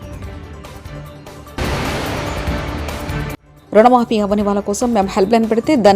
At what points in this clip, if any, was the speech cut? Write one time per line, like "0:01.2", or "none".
0:01.6
0:03.4